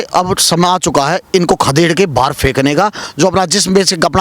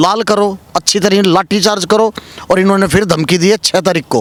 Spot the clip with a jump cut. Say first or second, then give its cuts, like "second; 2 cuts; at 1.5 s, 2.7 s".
first; 1 cut; at 3.0 s